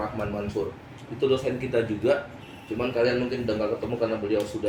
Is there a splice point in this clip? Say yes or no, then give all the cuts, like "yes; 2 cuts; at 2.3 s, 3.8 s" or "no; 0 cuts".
no; 0 cuts